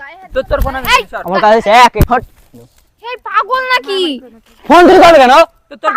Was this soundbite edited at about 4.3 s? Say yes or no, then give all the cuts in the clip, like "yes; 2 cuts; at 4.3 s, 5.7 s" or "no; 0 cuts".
no; 1 cut; at 2.0 s